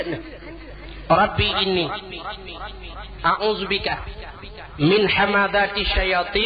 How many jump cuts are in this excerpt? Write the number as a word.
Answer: zero